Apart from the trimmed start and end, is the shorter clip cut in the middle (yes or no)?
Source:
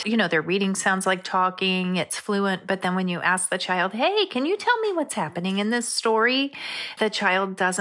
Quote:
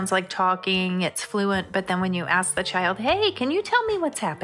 no